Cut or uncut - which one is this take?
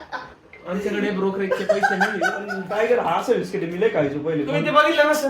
cut